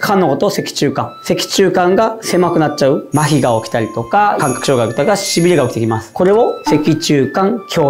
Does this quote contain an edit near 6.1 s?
yes; 2 cuts; at 3.1 s, 6.1 s

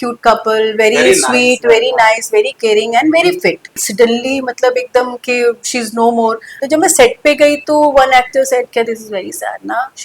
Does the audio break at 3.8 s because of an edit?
yes; 2 cuts; at 3.8 s, 6.6 s

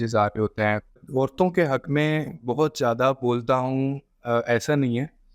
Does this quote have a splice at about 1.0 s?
yes; 1 cut; at 1.0 s

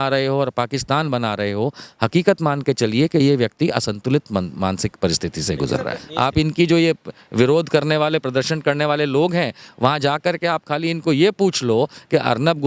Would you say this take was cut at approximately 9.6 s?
no; 1 cut; at 6.0 s

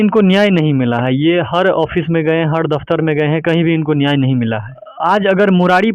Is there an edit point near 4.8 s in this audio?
yes; 1 cut; at 4.8 s

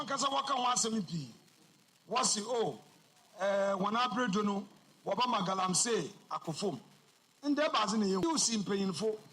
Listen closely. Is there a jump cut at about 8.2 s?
yes; 1 cut; at 8.2 s

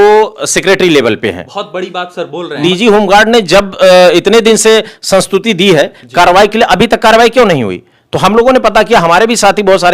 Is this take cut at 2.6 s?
yes; 1 cut; at 2.6 s

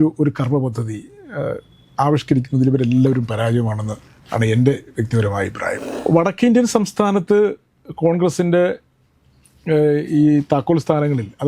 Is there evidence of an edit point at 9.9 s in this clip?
no; 1 cut; at 5.9 s

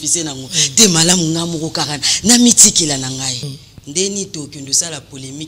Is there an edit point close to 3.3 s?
yes; 1 cut; at 3.3 s

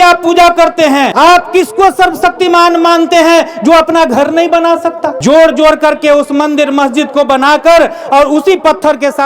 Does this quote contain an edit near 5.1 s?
yes; 2 cuts; at 1.1 s, 5.1 s

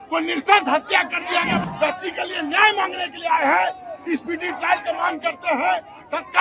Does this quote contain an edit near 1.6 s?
yes; 1 cut; at 1.6 s

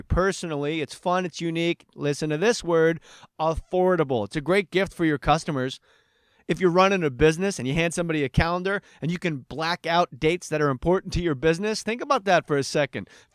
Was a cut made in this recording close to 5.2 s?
yes; 1 cut; at 5.2 s

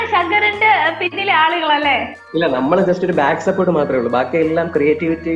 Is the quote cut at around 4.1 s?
no; 1 cut; at 2.2 s

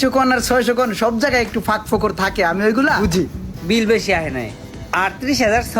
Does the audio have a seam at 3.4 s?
yes; 1 cut; at 3.4 s

